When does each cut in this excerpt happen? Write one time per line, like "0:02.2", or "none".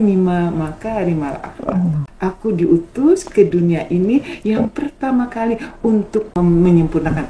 0:02.1
0:06.3